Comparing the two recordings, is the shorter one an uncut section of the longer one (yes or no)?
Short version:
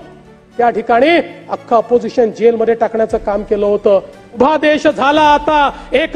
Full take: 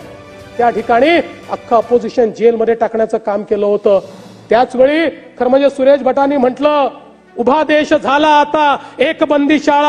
no